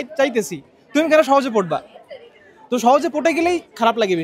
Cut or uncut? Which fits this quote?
uncut